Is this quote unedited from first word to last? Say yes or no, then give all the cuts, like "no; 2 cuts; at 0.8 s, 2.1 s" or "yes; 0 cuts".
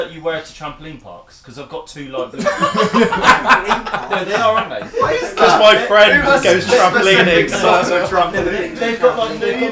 yes; 0 cuts